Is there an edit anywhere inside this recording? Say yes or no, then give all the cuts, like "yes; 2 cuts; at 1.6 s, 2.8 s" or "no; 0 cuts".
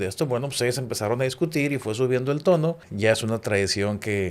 yes; 1 cut; at 2.9 s